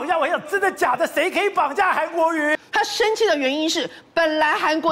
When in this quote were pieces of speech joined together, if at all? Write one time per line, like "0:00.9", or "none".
0:02.5